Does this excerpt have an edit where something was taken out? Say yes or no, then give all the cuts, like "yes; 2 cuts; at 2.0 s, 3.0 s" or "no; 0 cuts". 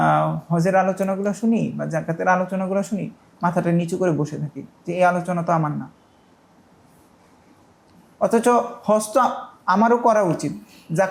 no; 0 cuts